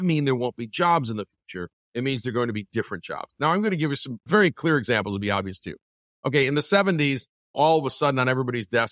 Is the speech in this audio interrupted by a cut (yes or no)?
yes